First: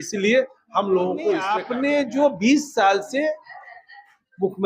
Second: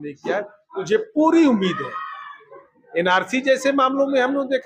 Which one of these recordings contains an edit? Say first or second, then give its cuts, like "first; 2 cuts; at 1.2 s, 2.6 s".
first; 1 cut; at 1.6 s